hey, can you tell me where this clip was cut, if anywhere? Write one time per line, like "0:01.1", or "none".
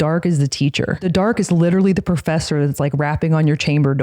0:01.0